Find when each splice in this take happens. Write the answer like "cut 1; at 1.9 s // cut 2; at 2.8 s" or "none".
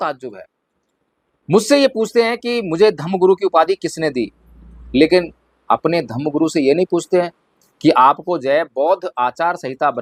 none